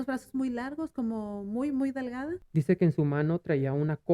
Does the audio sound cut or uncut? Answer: cut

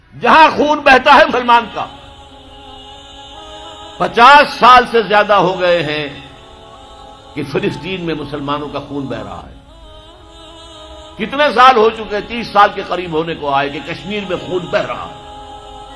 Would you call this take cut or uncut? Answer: cut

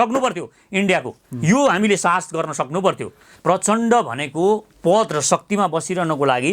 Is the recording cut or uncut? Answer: cut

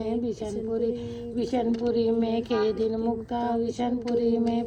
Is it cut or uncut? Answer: uncut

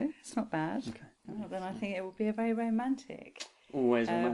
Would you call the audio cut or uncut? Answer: cut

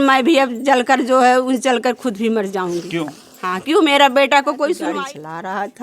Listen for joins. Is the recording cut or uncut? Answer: cut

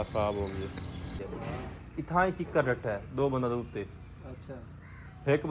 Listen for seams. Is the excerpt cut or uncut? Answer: cut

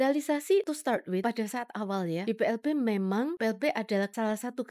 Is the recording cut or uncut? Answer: cut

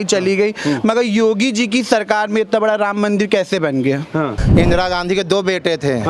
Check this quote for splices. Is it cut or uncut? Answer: cut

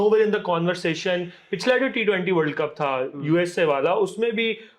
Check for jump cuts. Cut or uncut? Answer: uncut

